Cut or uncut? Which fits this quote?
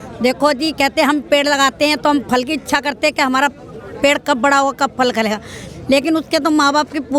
uncut